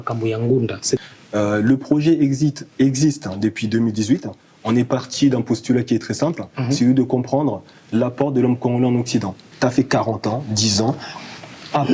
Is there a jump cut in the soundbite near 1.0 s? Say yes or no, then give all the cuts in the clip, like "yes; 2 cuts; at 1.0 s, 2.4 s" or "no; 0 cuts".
yes; 2 cuts; at 1.0 s, 9.5 s